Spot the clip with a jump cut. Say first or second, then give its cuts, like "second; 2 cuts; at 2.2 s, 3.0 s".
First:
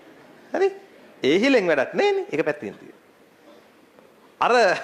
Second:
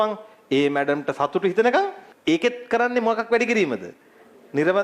second; 1 cut; at 2.1 s